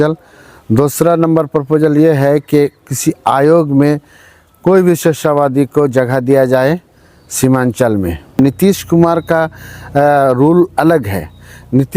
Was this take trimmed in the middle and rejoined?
yes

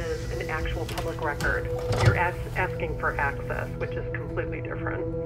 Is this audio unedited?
yes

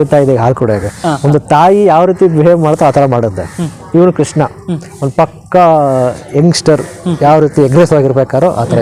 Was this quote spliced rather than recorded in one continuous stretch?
no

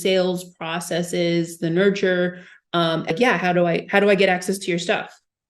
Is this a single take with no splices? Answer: no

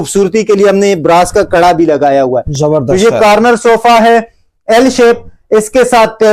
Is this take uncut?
yes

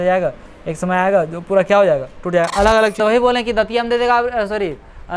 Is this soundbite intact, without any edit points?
no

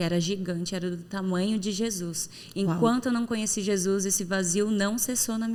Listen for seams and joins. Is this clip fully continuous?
yes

